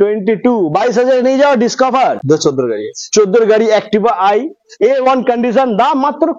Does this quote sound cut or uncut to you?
cut